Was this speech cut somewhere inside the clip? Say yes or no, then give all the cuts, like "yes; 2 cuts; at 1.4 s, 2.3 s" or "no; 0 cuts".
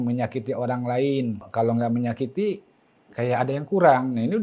yes; 1 cut; at 1.4 s